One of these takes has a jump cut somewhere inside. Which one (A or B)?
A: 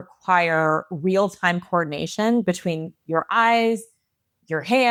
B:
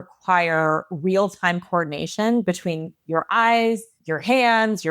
B